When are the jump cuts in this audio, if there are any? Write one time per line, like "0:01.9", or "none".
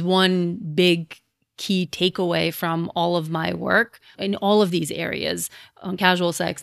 0:04.1